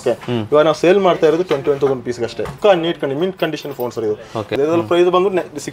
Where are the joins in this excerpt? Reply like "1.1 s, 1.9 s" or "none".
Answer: 2.5 s, 4.5 s